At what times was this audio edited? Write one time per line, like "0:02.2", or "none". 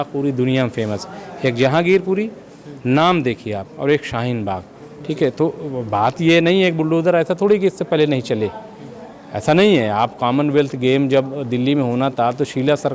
none